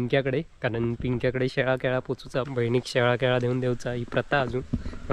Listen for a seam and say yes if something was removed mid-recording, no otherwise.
yes